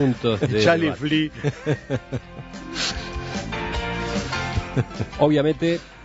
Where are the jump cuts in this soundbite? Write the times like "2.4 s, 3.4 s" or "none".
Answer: 1.5 s